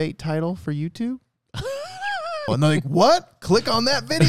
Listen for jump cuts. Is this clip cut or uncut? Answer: cut